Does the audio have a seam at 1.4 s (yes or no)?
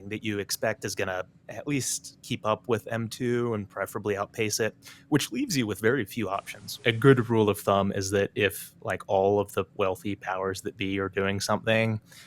yes